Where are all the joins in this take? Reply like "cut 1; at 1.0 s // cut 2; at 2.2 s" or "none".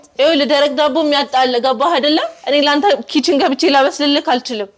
none